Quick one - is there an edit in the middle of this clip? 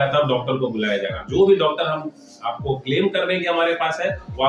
no; 0 cuts

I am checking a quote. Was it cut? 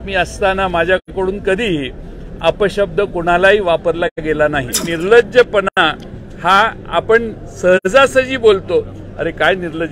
yes; 1 cut; at 4.8 s

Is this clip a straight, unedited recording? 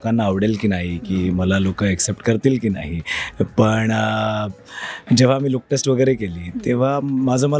yes; 0 cuts

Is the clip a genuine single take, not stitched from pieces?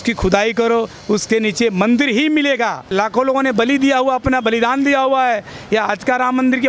no; 1 cut; at 2.8 s

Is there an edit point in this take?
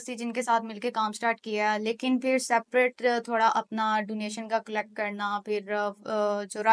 no; 0 cuts

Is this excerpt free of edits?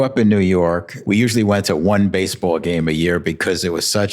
no; 1 cut; at 0.9 s

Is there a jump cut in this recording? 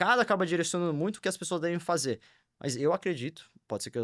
no; 0 cuts

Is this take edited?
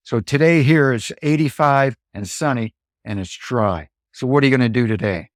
no; 0 cuts

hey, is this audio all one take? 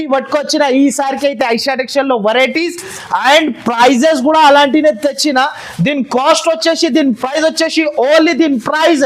yes; 0 cuts

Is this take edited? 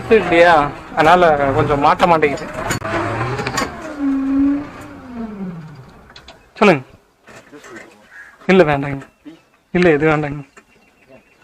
yes; 1 cut; at 2.8 s

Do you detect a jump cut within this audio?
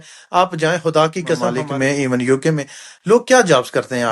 yes; 1 cut; at 1.6 s

